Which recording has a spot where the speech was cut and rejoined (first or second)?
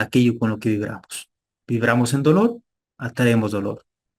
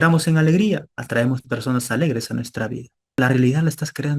second